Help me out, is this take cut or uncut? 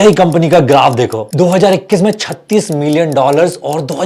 uncut